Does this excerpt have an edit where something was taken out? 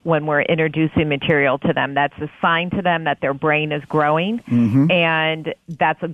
no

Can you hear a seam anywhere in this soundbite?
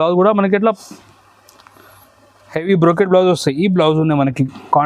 no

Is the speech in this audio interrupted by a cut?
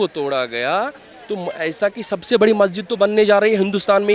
no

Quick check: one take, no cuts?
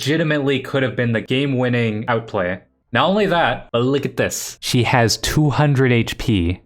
no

